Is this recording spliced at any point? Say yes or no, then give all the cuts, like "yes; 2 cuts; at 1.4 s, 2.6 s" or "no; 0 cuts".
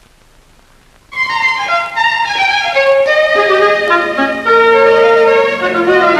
no; 0 cuts